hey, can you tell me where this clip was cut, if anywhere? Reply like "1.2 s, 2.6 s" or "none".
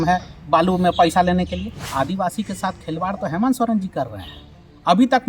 1.9 s